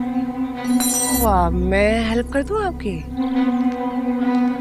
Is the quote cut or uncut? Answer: cut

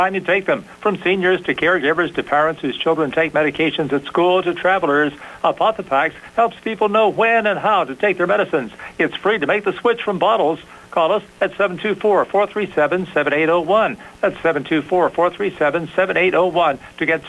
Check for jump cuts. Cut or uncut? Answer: uncut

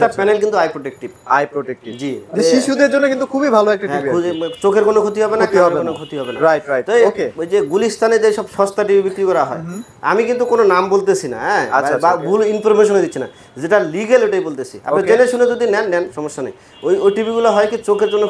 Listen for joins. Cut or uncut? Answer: uncut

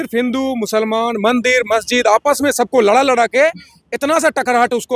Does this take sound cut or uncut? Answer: uncut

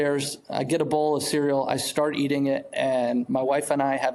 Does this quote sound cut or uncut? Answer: uncut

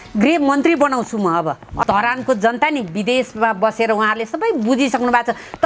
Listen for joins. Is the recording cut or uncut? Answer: cut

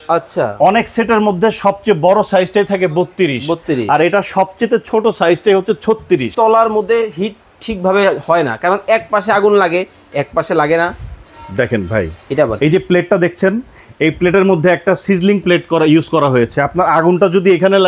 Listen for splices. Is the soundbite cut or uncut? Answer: cut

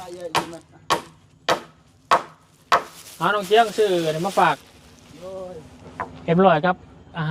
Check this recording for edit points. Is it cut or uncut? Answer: uncut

